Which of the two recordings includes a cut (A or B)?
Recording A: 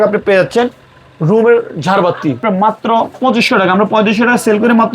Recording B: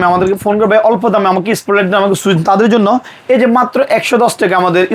A